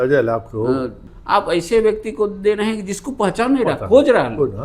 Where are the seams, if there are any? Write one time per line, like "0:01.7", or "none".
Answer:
0:01.0